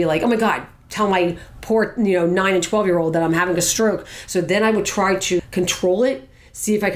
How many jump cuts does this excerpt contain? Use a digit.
1